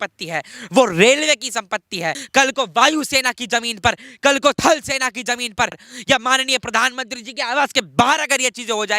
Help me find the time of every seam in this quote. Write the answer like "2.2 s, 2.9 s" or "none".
2.2 s, 5.9 s